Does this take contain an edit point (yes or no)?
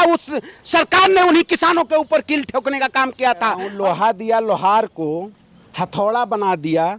yes